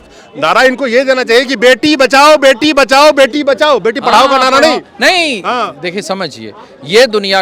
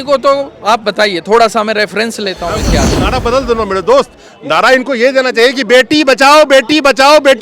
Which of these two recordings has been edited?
second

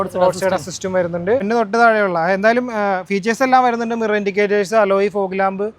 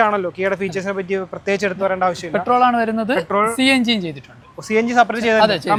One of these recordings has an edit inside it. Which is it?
first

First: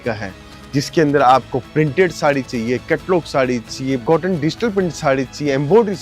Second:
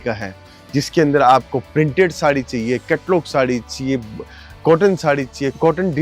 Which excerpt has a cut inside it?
first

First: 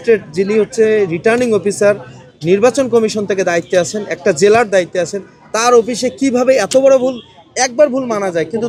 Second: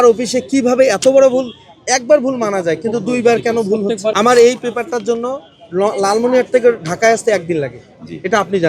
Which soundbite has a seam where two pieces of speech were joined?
second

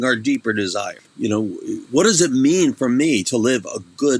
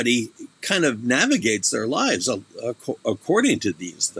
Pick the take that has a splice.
first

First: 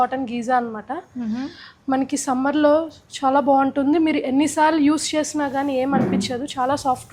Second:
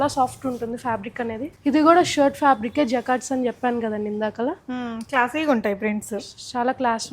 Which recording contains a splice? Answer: second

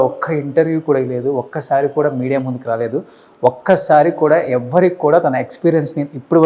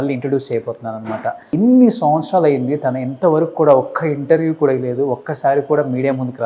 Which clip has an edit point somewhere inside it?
second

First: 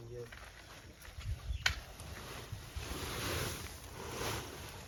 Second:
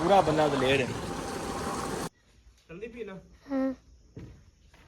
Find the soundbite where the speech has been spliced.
second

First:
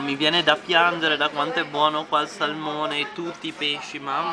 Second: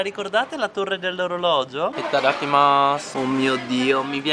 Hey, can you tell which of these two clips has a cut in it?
second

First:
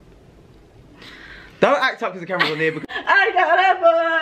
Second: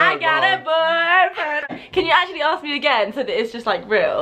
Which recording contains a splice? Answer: first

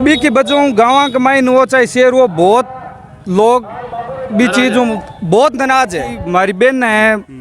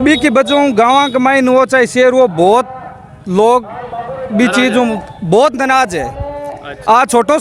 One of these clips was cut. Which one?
first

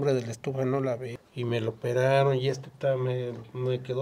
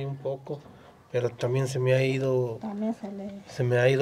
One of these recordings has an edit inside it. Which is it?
first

